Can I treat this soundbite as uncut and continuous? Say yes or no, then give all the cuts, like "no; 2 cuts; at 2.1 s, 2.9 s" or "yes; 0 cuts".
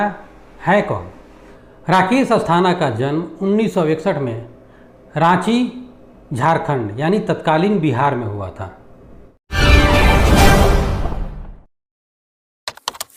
yes; 0 cuts